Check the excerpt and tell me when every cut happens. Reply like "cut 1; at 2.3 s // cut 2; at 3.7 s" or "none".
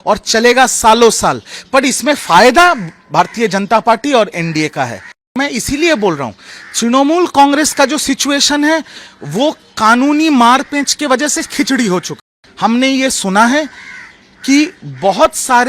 cut 1; at 5.4 s // cut 2; at 12.1 s